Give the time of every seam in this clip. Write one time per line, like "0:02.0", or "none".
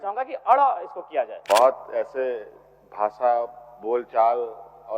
0:01.4